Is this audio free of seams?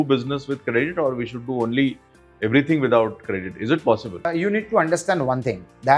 no; 1 cut; at 4.3 s

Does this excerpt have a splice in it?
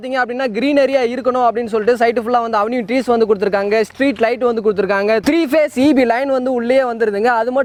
no; 0 cuts

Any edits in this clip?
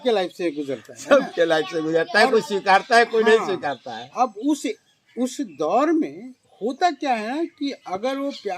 no; 0 cuts

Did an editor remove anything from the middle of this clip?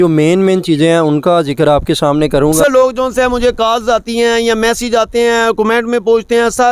yes; 1 cut; at 2.6 s

